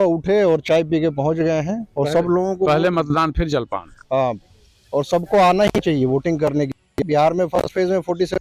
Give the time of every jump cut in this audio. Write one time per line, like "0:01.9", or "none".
none